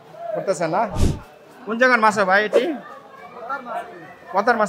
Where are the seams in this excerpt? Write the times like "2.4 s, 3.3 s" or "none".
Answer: 1.1 s